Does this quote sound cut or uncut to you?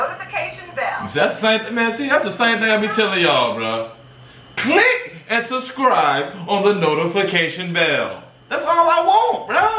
uncut